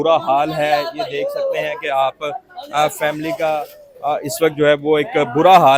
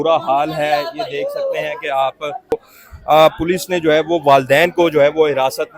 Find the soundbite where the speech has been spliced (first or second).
second